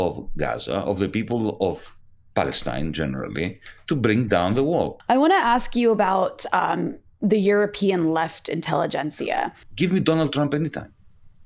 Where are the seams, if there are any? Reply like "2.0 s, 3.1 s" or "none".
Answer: 5.0 s, 9.6 s